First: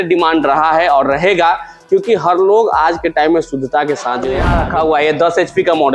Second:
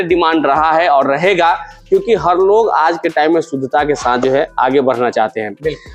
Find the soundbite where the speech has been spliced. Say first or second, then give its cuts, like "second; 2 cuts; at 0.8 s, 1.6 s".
first; 1 cut; at 4.4 s